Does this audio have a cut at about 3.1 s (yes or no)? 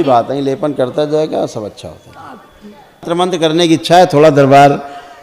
yes